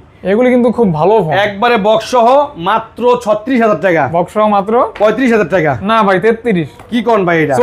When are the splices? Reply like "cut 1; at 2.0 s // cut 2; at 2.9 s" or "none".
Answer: none